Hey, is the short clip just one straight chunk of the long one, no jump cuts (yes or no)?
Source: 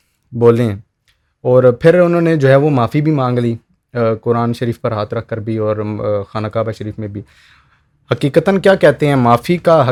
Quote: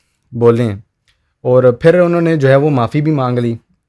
yes